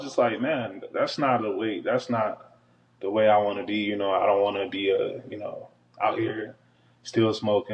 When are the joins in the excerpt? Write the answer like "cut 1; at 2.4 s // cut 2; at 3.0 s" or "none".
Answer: none